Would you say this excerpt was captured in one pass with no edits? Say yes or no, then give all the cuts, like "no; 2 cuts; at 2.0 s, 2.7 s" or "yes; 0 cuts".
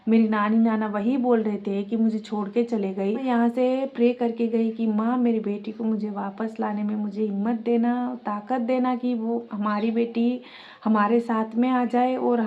no; 1 cut; at 3.2 s